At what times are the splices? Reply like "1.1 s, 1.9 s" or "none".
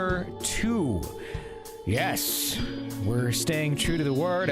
1.7 s